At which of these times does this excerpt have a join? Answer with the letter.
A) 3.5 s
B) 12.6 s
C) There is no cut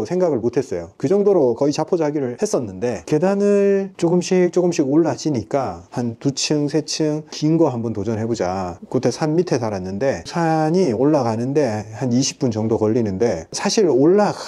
C